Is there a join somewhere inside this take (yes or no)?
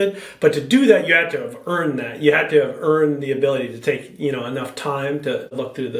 no